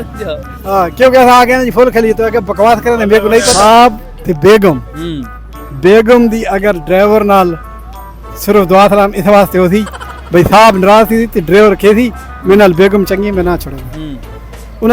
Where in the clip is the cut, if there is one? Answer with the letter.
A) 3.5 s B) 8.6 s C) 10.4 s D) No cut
A